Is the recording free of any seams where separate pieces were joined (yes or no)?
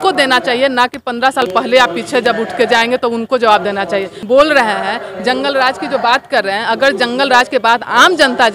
no